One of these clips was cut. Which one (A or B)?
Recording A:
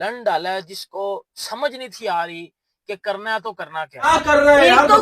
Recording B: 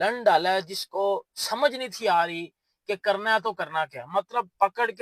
A